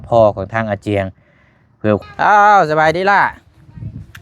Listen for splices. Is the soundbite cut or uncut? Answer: cut